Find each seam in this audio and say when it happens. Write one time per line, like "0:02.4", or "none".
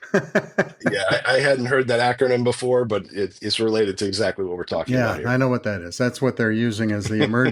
none